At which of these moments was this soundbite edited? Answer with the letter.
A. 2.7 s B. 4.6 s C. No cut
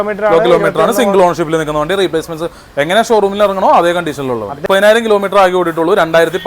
B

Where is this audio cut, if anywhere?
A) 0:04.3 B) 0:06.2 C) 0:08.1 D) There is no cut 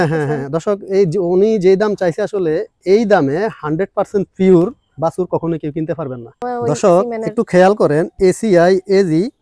B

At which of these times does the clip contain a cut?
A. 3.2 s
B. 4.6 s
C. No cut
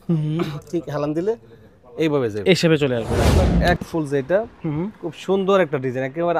A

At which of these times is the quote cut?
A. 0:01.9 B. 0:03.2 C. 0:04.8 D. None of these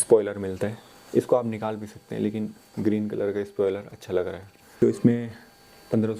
C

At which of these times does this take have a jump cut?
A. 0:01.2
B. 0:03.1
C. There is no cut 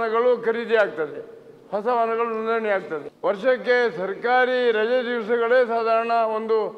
B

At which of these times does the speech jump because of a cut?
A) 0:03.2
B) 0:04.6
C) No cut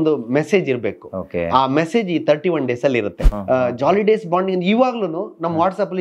A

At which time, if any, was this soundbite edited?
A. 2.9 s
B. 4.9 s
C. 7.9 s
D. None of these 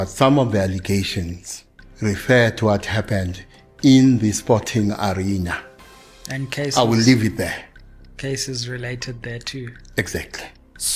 D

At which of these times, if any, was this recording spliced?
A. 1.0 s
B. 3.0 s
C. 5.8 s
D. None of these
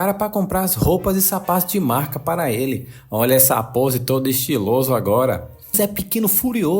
C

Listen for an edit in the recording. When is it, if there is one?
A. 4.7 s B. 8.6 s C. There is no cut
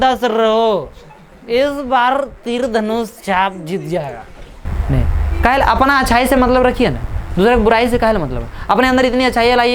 A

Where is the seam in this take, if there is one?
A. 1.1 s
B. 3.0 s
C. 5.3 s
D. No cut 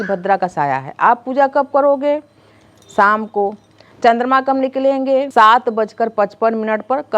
C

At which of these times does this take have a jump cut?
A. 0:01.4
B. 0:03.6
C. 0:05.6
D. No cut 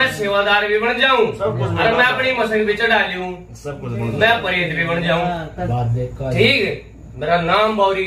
C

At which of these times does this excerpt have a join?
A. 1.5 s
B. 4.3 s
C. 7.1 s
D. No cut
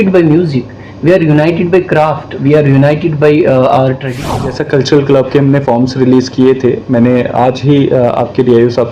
B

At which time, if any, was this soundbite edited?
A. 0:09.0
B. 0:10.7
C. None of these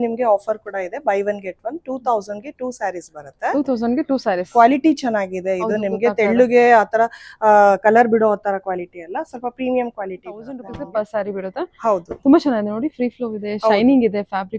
B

